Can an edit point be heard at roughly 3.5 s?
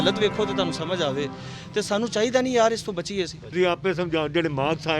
yes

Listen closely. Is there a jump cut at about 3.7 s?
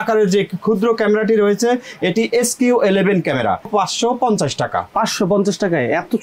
yes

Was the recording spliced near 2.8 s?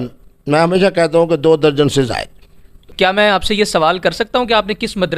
yes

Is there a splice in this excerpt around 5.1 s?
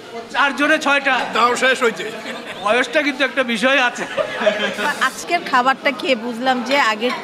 yes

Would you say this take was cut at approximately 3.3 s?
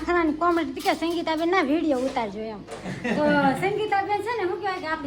no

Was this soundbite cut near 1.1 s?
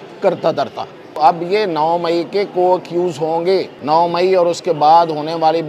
yes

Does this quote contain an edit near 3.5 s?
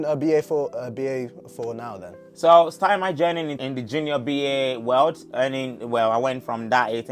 yes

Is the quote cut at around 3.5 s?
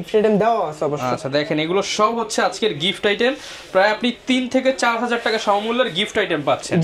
no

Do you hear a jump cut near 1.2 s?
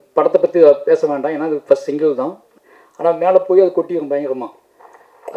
no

